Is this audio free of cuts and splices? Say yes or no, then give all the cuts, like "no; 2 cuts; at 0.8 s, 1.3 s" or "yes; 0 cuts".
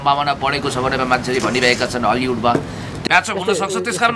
no; 1 cut; at 2.9 s